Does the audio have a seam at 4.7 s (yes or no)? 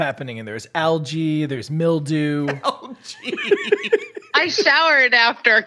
no